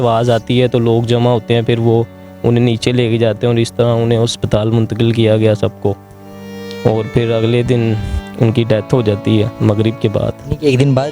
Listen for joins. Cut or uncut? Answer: uncut